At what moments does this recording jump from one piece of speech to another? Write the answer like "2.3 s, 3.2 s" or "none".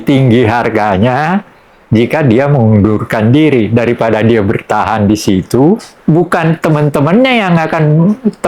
5.9 s